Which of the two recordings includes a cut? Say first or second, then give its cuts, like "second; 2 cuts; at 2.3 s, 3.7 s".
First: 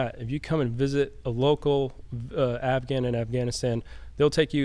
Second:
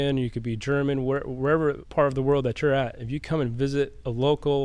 second; 1 cut; at 1.8 s